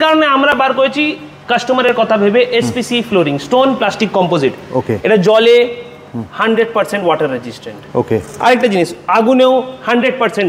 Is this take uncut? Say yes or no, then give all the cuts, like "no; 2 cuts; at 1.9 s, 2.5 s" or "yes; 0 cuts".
yes; 0 cuts